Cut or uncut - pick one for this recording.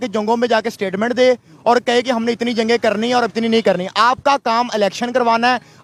uncut